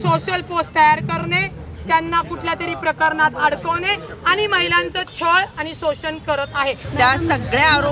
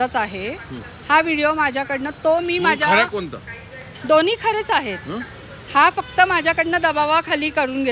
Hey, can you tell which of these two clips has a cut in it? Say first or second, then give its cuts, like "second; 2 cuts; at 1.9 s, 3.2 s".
first; 1 cut; at 6.8 s